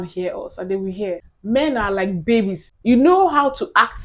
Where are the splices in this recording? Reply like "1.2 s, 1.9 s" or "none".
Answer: 1.3 s, 2.6 s